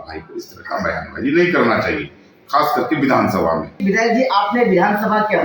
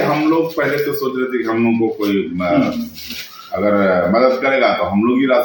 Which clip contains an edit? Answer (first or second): first